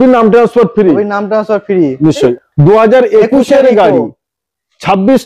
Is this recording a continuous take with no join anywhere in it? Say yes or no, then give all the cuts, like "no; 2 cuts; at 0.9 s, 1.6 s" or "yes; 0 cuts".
no; 1 cut; at 2.2 s